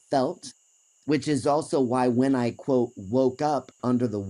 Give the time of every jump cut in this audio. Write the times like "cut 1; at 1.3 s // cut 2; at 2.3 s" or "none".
none